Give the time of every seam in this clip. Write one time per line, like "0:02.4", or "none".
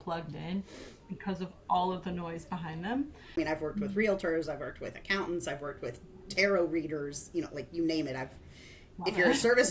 0:03.4